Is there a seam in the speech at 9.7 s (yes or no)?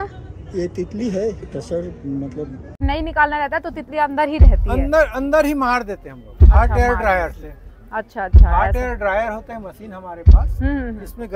no